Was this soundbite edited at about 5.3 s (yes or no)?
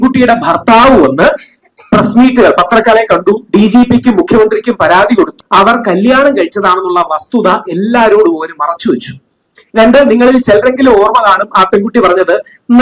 yes